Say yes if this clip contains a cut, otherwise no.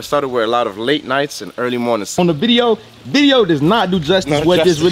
yes